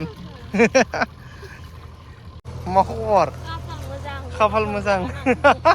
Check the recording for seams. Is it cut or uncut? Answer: cut